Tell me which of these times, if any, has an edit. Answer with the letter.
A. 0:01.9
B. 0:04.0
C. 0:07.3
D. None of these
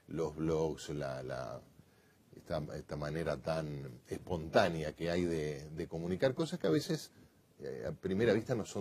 A